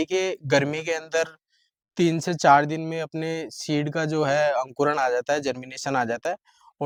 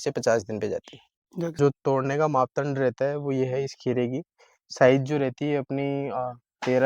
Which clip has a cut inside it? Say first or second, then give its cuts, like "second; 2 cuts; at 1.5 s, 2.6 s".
second; 1 cut; at 1.6 s